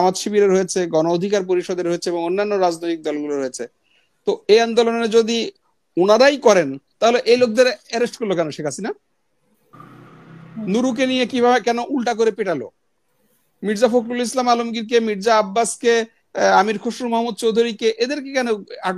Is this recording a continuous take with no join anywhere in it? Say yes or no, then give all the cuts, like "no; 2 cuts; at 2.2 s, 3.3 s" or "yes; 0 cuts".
yes; 0 cuts